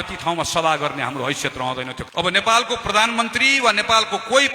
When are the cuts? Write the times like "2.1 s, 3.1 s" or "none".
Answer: 2.0 s